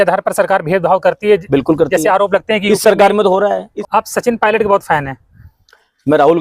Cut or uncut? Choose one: cut